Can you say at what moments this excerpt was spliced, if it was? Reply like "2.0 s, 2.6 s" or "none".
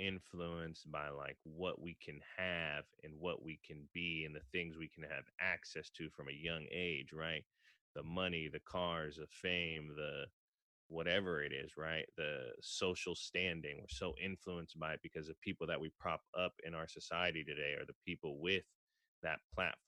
none